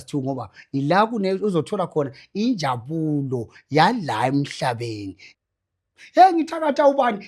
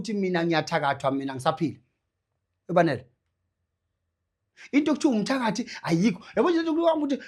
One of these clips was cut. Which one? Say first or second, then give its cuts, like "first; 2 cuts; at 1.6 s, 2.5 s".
first; 1 cut; at 5.2 s